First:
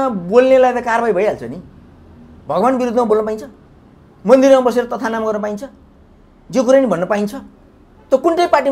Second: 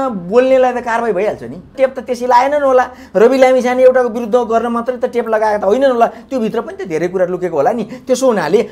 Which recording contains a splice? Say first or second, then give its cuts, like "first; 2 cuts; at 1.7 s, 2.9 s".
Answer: second; 1 cut; at 1.7 s